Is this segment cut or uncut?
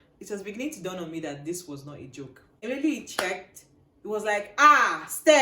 cut